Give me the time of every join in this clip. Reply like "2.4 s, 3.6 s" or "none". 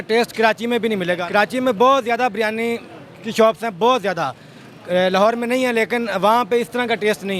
1.2 s